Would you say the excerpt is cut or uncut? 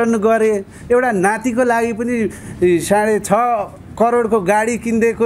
uncut